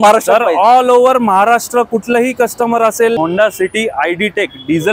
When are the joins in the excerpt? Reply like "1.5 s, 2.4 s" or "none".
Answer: 3.2 s

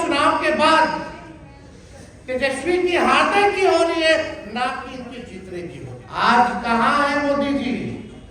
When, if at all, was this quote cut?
6.0 s

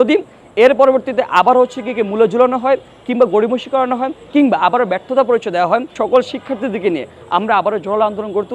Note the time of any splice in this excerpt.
5.9 s

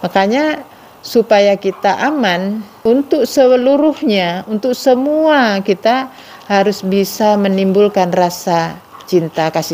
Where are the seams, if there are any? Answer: 2.7 s

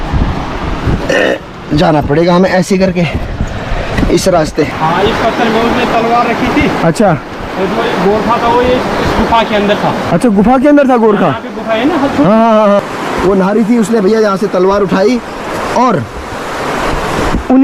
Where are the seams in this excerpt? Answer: 4.7 s, 12.8 s

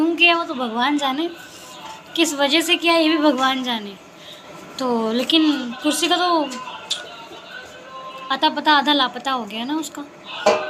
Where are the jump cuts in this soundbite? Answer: none

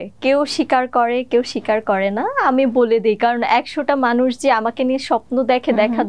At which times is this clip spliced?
none

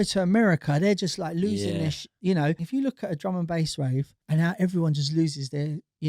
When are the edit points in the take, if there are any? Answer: 2.6 s, 4.1 s

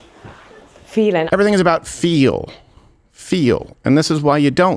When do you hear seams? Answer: 1.3 s

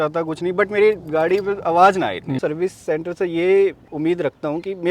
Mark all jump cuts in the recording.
2.3 s

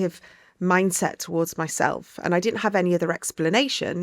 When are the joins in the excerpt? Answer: none

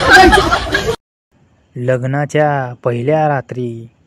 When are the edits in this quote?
1.1 s

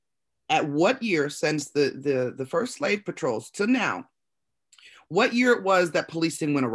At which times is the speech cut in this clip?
none

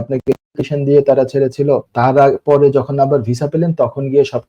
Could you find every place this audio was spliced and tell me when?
1.9 s

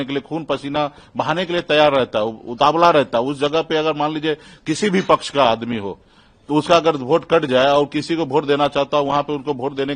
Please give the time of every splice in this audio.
none

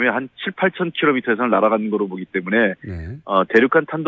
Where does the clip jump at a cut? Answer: 2.9 s

